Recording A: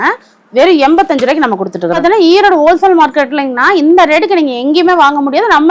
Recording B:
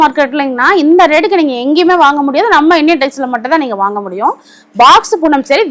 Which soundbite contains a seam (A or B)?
A